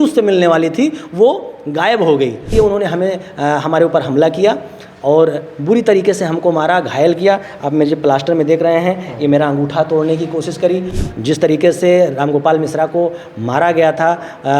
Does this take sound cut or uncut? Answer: cut